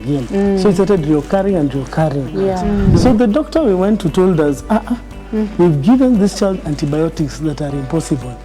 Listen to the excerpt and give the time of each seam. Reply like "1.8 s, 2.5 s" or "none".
2.6 s